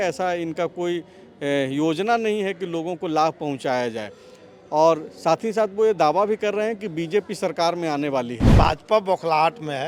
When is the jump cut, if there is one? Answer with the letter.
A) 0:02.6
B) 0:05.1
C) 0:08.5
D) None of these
C